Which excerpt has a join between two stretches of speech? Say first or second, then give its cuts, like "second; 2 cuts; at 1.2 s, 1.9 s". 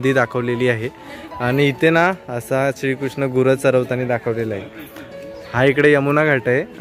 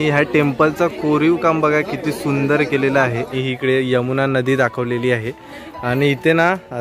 second; 1 cut; at 3.4 s